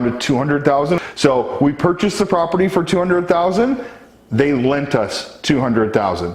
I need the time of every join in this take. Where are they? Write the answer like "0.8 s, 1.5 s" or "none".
1.0 s